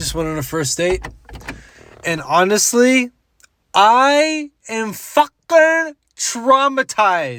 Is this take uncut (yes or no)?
yes